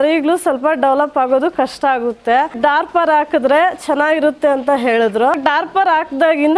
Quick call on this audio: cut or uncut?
cut